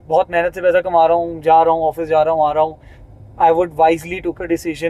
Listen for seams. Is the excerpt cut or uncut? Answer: uncut